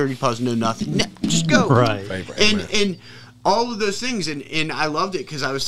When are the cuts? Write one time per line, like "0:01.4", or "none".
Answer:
none